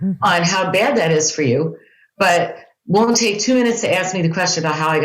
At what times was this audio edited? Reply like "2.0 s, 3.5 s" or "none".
none